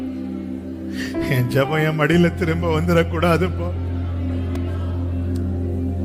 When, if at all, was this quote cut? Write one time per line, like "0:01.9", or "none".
none